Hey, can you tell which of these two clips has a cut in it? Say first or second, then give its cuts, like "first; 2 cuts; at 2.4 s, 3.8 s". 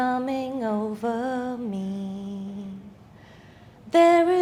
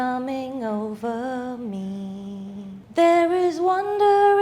second; 1 cut; at 2.8 s